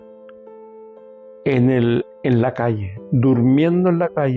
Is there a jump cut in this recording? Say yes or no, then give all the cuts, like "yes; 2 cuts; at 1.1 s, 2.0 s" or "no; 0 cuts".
no; 0 cuts